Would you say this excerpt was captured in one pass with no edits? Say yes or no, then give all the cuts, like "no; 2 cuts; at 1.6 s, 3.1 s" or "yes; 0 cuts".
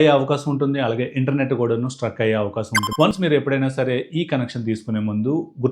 no; 1 cut; at 2.8 s